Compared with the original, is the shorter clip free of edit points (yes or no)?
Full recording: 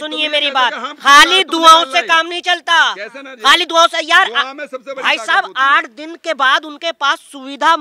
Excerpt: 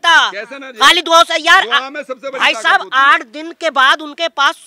yes